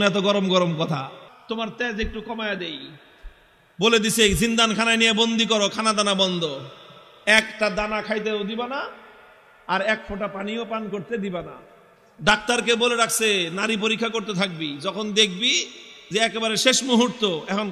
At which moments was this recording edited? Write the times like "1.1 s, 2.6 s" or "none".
1.3 s